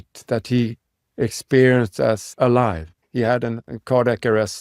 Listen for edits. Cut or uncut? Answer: cut